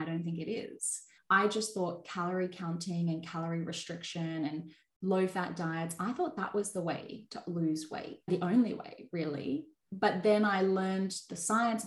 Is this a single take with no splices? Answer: no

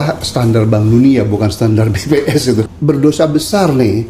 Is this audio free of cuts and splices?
no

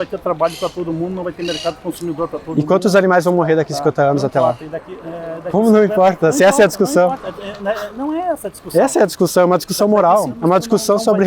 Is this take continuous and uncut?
no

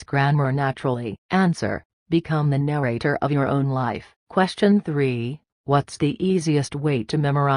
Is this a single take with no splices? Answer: no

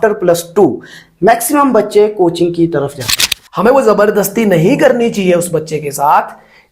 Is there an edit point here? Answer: yes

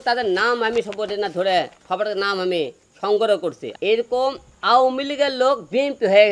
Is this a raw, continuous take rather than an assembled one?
no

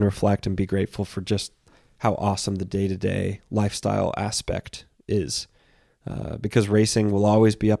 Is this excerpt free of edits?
yes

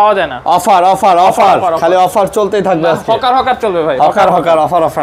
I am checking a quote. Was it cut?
no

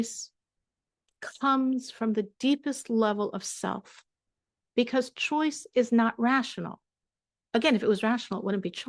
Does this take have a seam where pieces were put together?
no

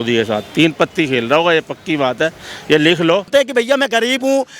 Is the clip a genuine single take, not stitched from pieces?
no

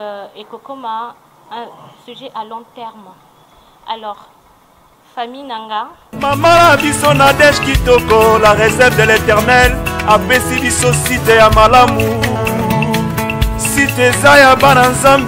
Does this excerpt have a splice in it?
yes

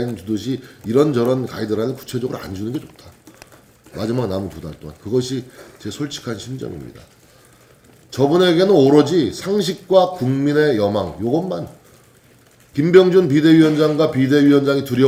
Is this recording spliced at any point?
no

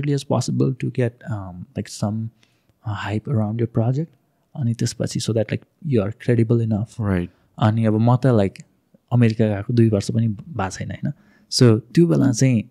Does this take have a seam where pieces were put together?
no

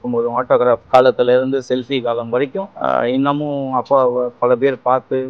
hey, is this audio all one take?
no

